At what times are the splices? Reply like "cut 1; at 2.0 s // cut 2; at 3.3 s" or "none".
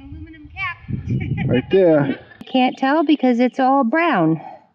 cut 1; at 2.5 s